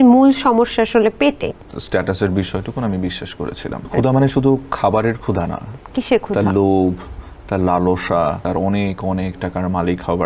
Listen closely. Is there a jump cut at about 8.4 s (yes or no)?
yes